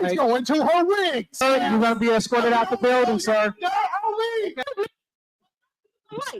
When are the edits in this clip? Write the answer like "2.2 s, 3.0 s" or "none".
1.4 s, 4.6 s